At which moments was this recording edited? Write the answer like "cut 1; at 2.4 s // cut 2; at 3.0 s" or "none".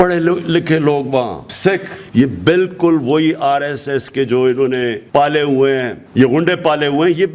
cut 1; at 2.0 s // cut 2; at 5.0 s // cut 3; at 6.0 s